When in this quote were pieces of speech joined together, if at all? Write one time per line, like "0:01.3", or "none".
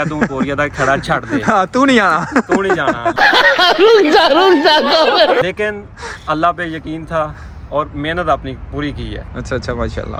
none

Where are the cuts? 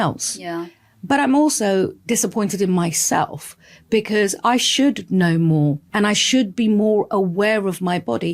0:05.8

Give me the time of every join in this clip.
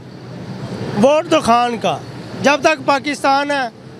none

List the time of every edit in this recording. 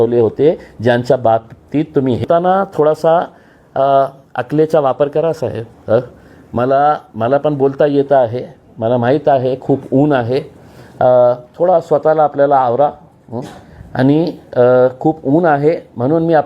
0:02.2

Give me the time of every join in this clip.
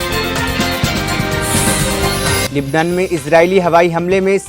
0:02.5

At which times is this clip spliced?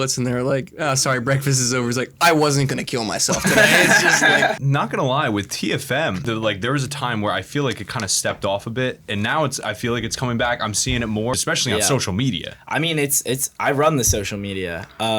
0:04.6
0:06.2
0:11.3

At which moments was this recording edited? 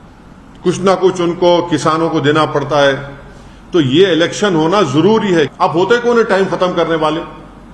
0:05.5

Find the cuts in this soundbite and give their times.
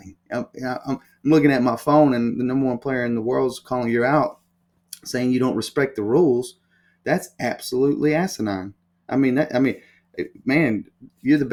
none

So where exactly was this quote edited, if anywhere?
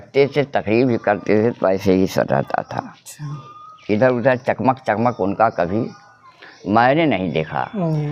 none

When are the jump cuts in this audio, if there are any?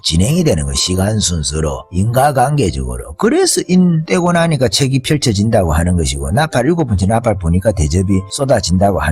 0:01.8
0:04.0
0:08.3

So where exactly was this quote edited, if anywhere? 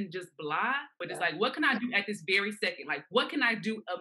0:00.9

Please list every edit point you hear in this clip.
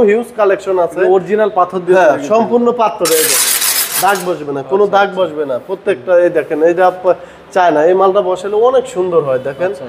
none

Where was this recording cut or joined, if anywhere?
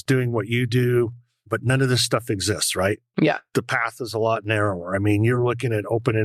none

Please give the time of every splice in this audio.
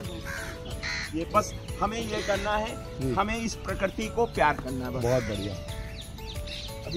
0:01.3

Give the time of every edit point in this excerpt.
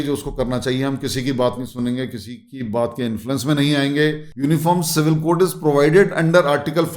0:04.2

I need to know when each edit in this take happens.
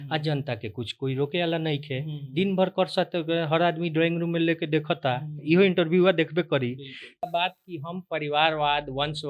0:07.3

